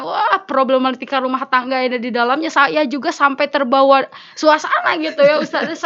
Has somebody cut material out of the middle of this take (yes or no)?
no